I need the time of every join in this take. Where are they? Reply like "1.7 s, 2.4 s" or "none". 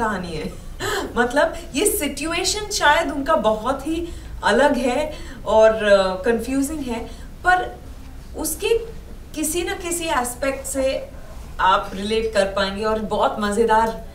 none